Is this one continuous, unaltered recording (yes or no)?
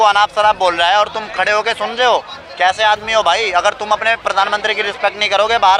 yes